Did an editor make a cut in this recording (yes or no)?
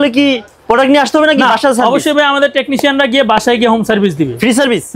no